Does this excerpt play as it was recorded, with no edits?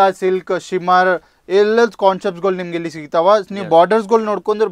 yes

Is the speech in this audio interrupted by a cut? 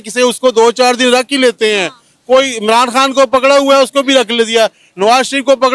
no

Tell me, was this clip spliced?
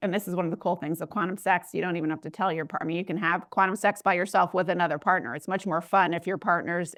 no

